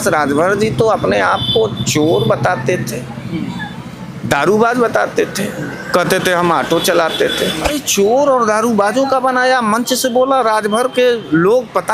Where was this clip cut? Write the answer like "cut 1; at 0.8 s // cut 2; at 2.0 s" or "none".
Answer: cut 1; at 7.7 s